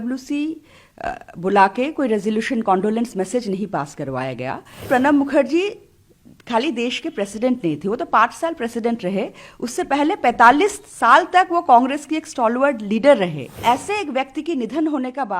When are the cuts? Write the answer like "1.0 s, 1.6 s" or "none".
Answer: 4.8 s, 13.5 s